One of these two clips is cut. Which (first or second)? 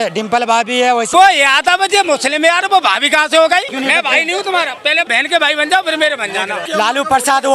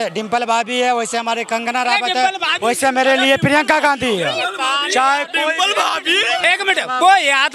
first